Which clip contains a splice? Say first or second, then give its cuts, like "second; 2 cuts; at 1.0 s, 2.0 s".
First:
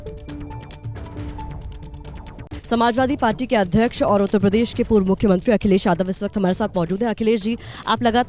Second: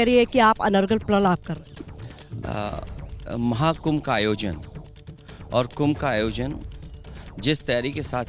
first; 1 cut; at 2.8 s